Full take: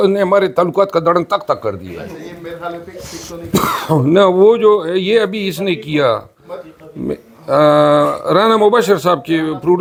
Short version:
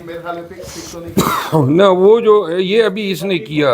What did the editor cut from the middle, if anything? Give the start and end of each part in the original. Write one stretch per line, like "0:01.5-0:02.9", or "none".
none